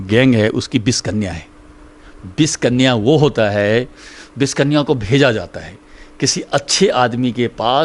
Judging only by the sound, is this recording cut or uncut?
uncut